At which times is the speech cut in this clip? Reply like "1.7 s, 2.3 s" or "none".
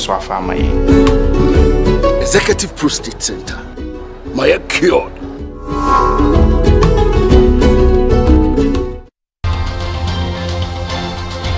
9.4 s